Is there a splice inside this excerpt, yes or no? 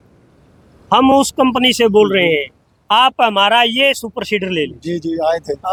no